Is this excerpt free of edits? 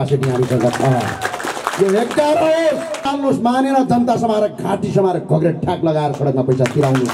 no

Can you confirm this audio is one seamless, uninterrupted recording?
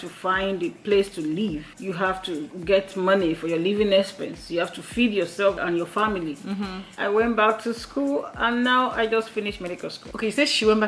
no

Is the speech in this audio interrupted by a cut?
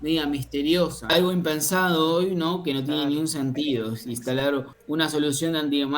yes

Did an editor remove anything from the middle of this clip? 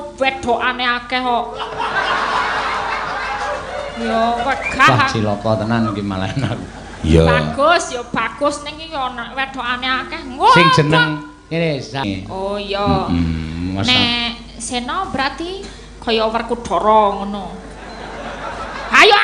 yes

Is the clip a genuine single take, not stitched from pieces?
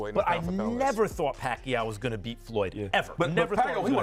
yes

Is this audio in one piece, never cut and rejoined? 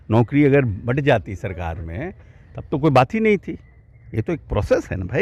yes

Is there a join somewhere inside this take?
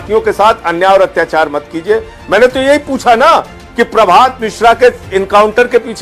no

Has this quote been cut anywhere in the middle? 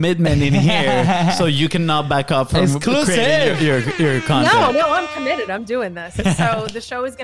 no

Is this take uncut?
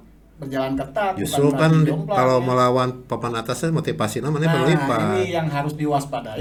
yes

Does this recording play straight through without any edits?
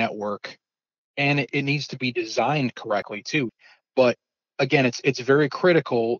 no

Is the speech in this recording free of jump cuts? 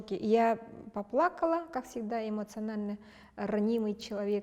yes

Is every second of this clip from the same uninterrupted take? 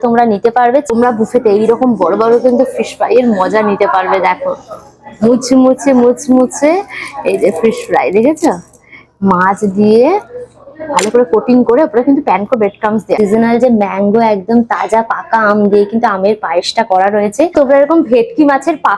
no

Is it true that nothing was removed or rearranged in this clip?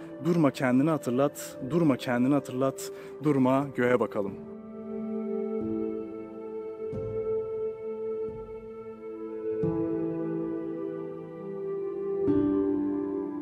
yes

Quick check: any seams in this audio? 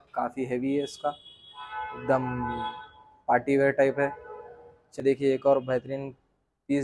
yes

